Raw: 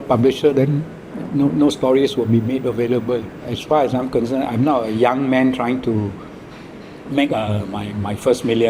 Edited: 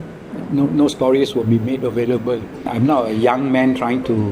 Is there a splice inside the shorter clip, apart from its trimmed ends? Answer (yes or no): yes